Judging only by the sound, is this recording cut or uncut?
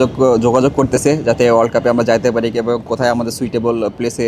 uncut